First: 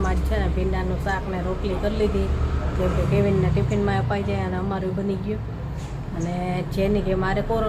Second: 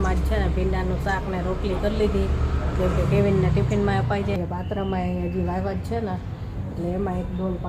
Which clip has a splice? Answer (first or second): second